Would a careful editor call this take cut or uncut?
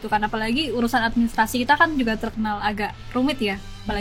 uncut